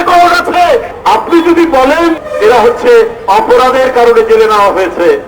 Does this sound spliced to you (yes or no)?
yes